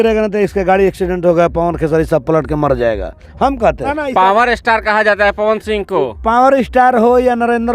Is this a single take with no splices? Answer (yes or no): no